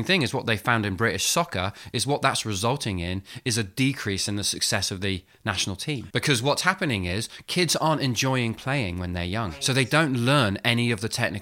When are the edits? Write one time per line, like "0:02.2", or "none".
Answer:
0:06.0
0:09.5